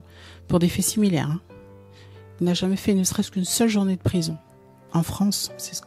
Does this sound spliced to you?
no; 0 cuts

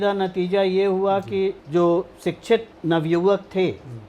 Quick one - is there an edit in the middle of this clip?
yes; 2 cuts; at 1.6 s, 2.7 s

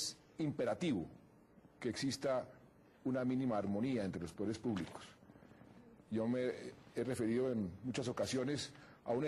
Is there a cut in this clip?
yes; 1 cut; at 4.1 s

